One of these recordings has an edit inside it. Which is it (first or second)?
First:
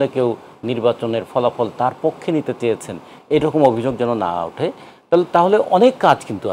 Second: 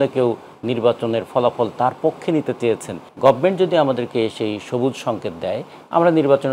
second